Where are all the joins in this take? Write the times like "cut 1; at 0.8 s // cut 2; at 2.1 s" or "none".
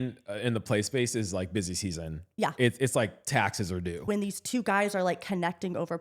cut 1; at 4.0 s